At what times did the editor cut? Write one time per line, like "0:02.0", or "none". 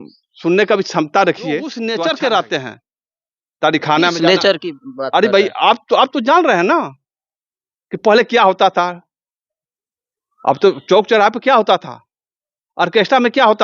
0:01.8